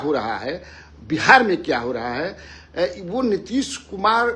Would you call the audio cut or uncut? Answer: uncut